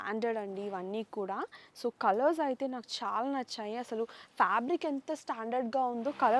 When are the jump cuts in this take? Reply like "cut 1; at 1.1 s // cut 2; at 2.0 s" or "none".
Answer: none